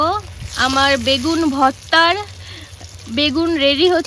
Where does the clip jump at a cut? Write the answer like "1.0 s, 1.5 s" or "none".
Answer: none